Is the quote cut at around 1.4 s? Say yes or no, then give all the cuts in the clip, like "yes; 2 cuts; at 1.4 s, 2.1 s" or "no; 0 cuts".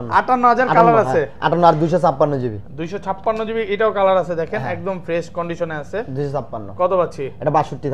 no; 0 cuts